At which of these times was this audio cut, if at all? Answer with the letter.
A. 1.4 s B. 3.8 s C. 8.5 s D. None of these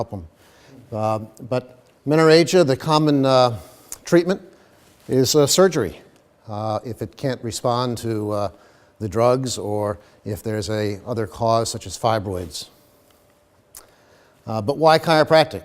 C